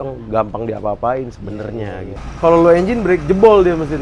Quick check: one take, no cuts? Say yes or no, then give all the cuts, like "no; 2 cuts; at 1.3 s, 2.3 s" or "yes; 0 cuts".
no; 1 cut; at 2.1 s